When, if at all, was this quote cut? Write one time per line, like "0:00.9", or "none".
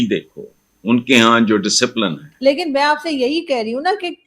0:02.4